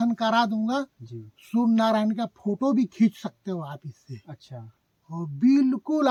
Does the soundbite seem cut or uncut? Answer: uncut